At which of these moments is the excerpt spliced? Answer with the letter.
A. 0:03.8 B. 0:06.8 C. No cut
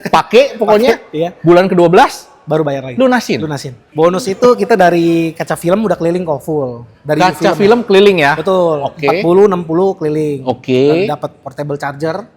A